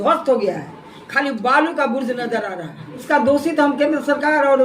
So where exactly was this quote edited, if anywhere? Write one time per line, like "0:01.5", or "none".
0:03.0